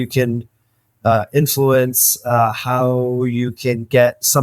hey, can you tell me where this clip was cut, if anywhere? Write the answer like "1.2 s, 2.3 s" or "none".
none